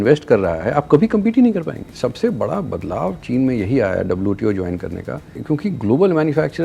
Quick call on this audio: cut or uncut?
cut